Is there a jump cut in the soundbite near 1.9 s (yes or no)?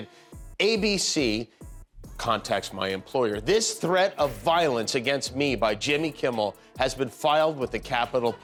no